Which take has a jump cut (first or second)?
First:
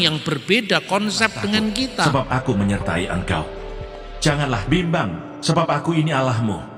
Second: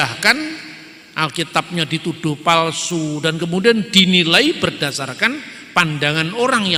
first